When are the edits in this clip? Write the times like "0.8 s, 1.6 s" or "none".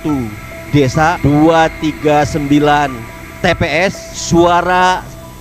1.2 s, 4.1 s